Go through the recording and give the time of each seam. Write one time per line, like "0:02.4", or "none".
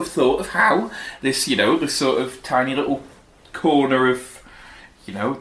none